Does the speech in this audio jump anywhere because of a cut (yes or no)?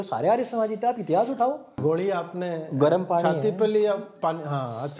yes